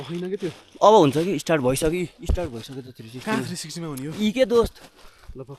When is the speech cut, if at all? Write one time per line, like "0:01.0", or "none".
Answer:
none